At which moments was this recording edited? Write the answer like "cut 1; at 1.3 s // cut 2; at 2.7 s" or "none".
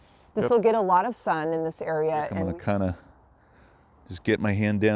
cut 1; at 2.4 s